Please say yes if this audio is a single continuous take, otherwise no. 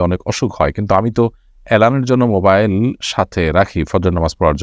yes